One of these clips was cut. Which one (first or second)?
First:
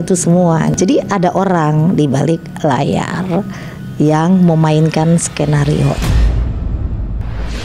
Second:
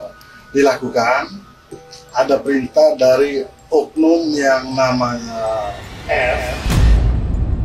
first